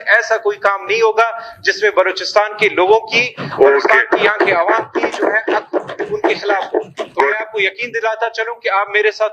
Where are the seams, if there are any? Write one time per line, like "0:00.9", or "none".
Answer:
none